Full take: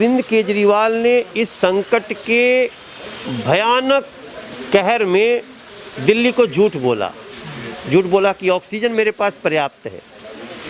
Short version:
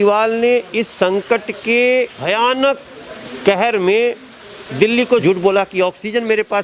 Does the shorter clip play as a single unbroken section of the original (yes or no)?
no